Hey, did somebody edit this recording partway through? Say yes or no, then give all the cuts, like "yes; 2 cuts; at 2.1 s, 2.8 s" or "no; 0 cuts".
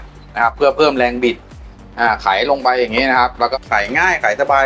yes; 1 cut; at 3.5 s